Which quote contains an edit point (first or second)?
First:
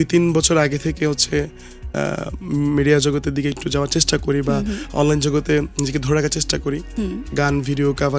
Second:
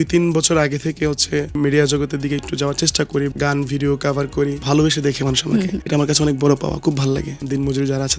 second